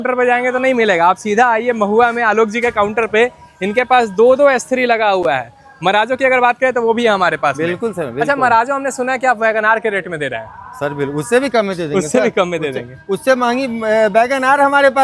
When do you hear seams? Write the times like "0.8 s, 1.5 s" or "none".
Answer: none